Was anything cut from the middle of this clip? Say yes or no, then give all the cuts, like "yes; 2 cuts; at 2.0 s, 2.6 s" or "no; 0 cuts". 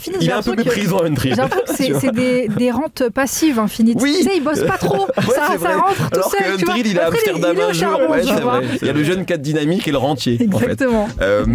yes; 1 cut; at 8.7 s